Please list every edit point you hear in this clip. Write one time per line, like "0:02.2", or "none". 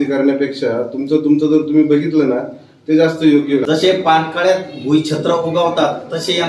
0:03.6